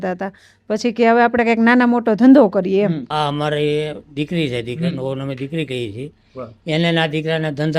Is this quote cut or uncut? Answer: cut